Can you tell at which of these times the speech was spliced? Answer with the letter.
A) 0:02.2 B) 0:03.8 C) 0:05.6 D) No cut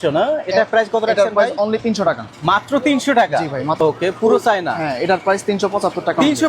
B